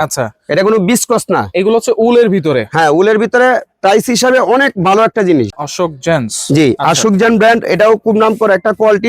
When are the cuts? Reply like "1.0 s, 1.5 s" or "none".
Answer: 5.6 s